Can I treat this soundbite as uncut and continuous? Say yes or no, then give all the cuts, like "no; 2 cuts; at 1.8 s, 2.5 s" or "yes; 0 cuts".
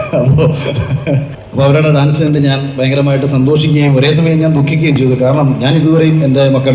no; 1 cut; at 1.4 s